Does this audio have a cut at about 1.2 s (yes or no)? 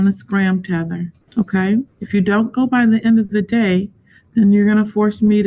yes